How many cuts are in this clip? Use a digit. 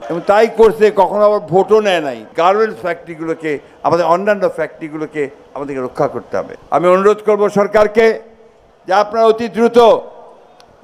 0